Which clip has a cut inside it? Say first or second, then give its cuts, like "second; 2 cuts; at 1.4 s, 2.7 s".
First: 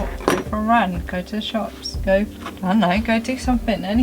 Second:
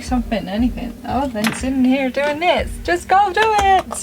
first; 1 cut; at 2.4 s